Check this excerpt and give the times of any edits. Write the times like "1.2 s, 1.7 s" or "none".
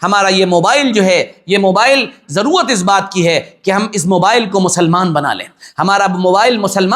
none